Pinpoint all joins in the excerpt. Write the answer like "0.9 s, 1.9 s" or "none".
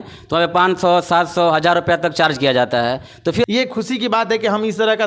3.5 s